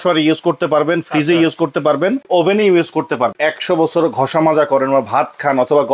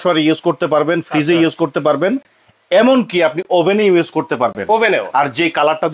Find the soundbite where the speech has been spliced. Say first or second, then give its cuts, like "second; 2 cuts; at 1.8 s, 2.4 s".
first; 2 cuts; at 2.2 s, 3.3 s